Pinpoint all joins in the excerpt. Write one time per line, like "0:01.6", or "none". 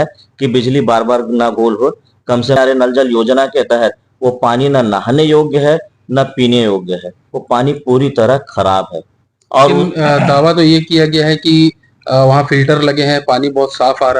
0:02.6